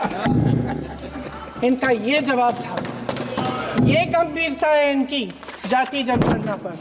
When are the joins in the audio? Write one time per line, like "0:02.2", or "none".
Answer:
none